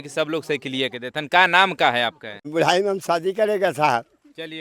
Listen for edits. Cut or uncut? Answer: cut